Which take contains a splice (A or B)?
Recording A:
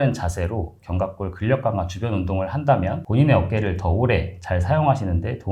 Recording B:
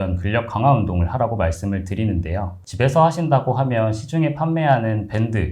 B